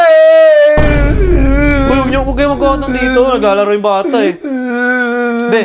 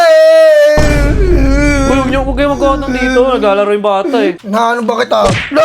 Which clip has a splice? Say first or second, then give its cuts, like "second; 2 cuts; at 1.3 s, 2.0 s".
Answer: second; 1 cut; at 4.4 s